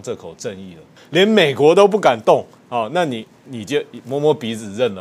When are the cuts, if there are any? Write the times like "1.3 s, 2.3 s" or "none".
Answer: 1.0 s